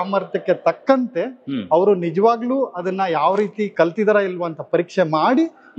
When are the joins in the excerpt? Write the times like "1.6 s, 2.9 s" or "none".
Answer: none